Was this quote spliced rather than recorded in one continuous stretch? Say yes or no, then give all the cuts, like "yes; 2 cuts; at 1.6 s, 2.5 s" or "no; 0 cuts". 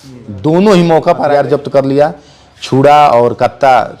yes; 1 cut; at 1.3 s